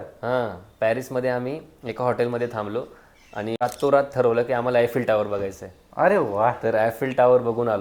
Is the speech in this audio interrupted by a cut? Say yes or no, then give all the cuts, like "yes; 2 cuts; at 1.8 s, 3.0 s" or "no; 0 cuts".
yes; 1 cut; at 3.6 s